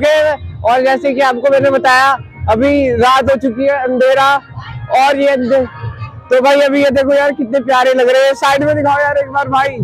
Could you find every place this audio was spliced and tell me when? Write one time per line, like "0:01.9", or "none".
none